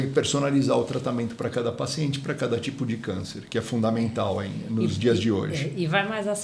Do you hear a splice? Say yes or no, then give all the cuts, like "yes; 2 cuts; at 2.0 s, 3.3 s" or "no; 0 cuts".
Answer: no; 0 cuts